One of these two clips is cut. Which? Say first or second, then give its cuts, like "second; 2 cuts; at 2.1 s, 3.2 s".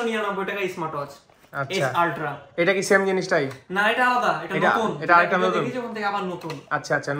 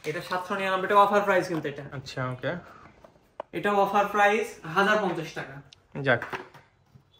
second; 1 cut; at 1.9 s